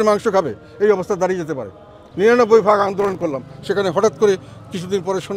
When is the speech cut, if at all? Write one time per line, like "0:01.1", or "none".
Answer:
0:02.1

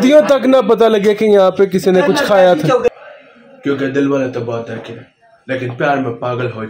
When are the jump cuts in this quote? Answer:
0:02.9

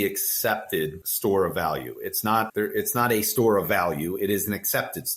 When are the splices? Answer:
0:01.0
0:02.5

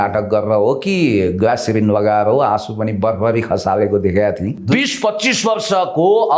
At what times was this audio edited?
0:04.6

